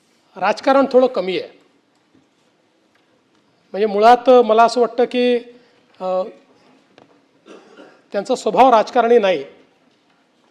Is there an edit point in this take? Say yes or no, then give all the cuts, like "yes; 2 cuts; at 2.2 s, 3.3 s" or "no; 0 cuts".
no; 0 cuts